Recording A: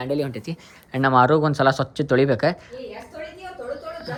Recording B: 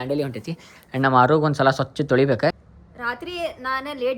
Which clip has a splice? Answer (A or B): B